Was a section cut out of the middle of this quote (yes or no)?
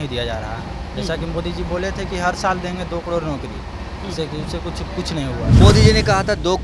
yes